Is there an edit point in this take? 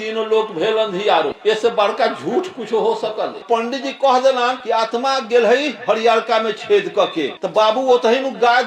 yes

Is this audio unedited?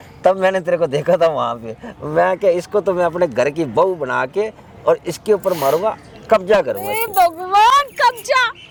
yes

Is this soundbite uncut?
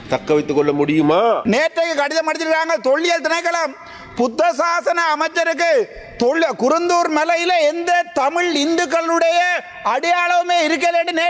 no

